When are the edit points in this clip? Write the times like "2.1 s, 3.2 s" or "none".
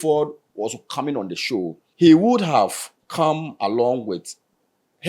1.8 s